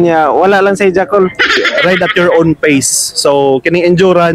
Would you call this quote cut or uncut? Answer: cut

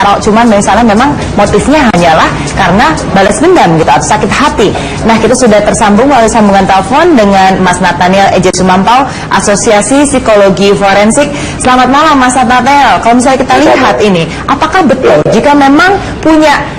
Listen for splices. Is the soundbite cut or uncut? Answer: cut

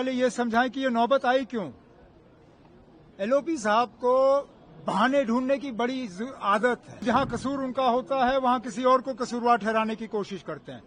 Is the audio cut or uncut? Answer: cut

